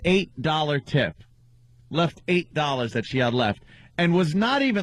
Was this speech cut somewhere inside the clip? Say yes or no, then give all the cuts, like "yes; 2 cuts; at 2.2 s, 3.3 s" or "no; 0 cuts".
no; 0 cuts